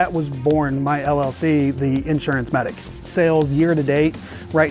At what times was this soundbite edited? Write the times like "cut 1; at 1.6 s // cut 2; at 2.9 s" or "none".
cut 1; at 2.8 s